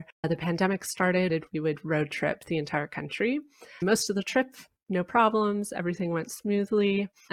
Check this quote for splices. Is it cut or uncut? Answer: cut